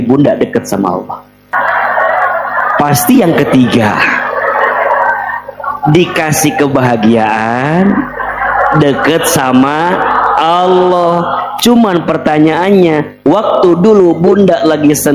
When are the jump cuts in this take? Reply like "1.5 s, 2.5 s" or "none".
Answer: 1.5 s